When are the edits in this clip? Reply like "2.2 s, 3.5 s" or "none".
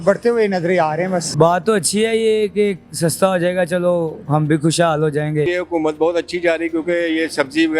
1.3 s, 5.5 s